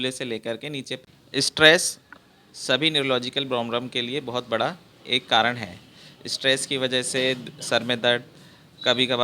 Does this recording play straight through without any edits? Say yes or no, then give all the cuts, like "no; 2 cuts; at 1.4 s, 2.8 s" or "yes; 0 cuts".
no; 1 cut; at 1.0 s